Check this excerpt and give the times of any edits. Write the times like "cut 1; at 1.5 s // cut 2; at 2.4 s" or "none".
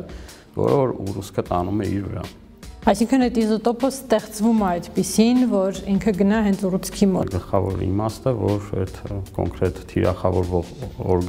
cut 1; at 7.2 s